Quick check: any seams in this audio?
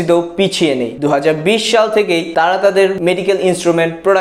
yes; 2 cuts; at 0.9 s, 2.3 s

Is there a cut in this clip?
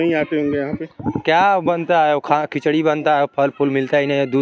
no; 0 cuts

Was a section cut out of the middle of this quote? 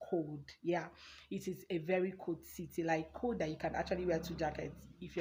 no; 0 cuts

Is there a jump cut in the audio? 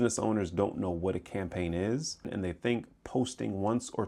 yes; 1 cut; at 2.3 s

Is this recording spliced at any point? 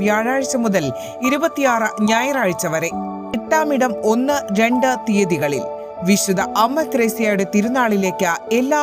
yes; 1 cut; at 3.4 s

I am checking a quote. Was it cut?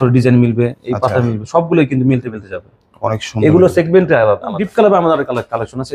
yes; 1 cut; at 4.6 s

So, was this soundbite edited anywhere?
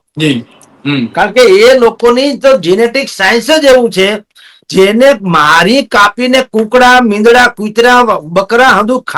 no; 0 cuts

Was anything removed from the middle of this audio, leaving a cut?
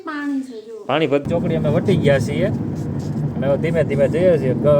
yes; 1 cut; at 1.3 s

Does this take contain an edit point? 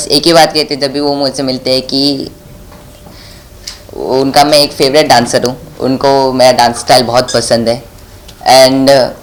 no; 0 cuts

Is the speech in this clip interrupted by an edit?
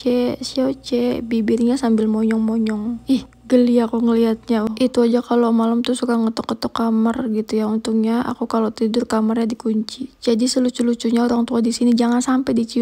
yes; 1 cut; at 4.7 s

